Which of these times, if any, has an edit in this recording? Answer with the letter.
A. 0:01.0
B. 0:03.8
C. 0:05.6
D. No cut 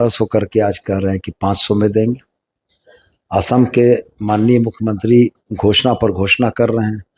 D